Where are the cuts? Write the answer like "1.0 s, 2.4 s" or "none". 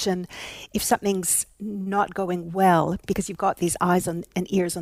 none

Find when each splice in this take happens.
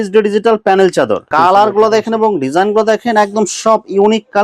1.2 s

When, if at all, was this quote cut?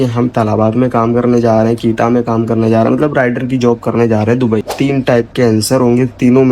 4.7 s

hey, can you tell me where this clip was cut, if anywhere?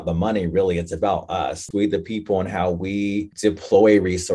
1.6 s, 3.3 s

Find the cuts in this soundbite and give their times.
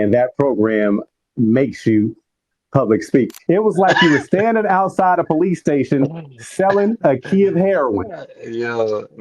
3.4 s

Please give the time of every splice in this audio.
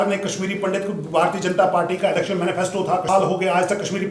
3.0 s

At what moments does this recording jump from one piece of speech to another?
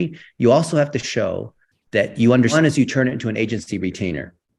2.5 s

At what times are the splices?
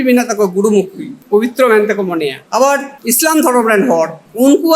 1.2 s, 2.9 s

